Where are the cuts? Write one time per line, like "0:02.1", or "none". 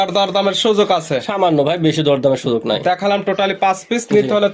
none